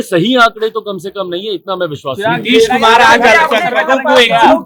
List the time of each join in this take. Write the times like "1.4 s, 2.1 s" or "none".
none